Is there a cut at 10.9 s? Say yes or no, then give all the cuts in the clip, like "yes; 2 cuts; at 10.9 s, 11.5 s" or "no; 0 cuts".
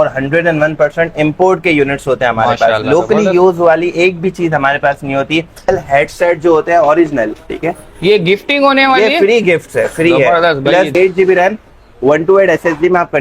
yes; 2 cuts; at 5.7 s, 10.9 s